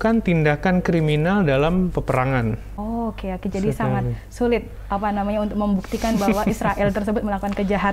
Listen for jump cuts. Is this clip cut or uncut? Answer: cut